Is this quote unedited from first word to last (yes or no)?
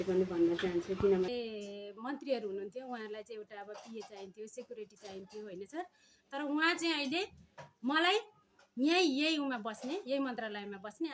no